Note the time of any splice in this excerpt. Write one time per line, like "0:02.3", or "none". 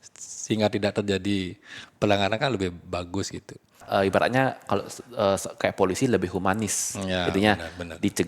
0:03.8